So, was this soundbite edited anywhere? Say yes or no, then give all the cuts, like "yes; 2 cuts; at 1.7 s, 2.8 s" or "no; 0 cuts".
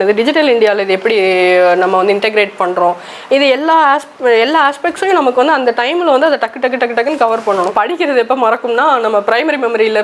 yes; 1 cut; at 7.7 s